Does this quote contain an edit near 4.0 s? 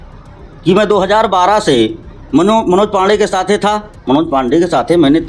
no; 0 cuts

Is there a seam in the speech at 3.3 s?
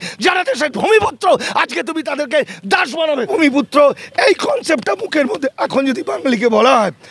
yes; 1 cut; at 3.3 s

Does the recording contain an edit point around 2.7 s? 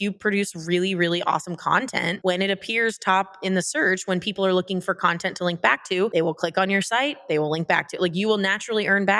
no; 1 cut; at 6.1 s

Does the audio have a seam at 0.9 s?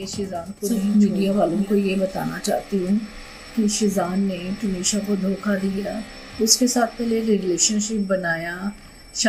yes; 1 cut; at 0.9 s

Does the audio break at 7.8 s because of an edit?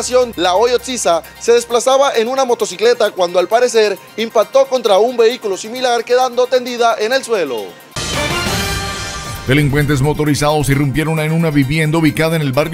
yes; 2 cuts; at 7.8 s, 9.3 s

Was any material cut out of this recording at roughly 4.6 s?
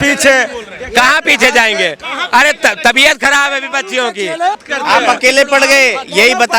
yes; 1 cut; at 4.6 s

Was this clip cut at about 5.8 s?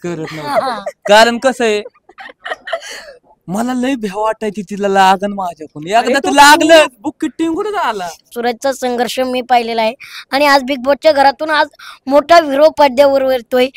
no; 1 cut; at 8.3 s

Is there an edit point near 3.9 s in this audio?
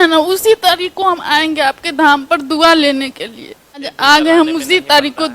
yes; 1 cut; at 3.9 s

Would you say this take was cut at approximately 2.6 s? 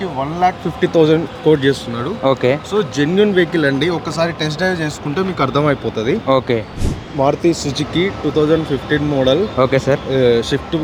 no; 1 cut; at 7.0 s

